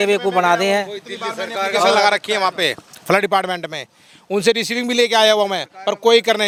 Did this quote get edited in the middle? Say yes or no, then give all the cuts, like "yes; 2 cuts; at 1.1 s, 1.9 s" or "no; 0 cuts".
no; 0 cuts